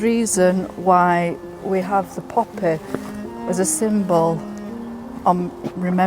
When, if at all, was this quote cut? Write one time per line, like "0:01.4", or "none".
none